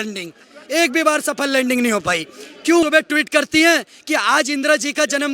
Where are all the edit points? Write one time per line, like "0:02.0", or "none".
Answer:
0:02.8